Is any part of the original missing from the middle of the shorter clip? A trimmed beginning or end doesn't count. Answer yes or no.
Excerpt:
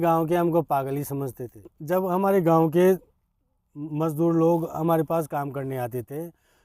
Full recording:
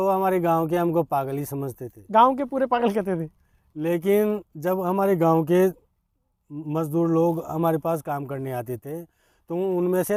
yes